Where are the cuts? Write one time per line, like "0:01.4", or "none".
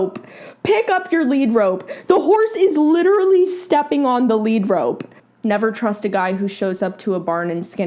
0:05.1